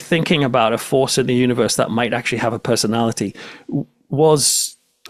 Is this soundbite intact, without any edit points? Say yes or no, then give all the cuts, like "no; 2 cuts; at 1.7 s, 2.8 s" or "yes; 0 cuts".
yes; 0 cuts